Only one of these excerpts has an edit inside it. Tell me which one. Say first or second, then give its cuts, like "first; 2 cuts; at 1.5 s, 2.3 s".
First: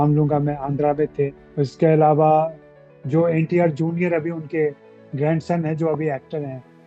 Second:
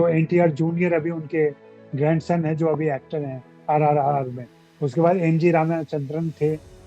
first; 1 cut; at 1.4 s